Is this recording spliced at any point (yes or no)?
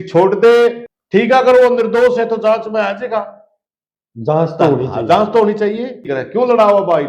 yes